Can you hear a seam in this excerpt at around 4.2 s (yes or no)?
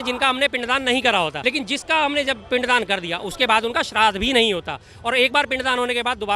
no